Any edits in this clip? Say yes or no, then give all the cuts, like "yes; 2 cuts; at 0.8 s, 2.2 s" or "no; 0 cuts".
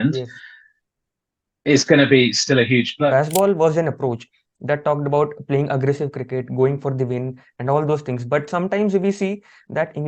yes; 1 cut; at 3.1 s